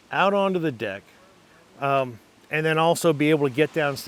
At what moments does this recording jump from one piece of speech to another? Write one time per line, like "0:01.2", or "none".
none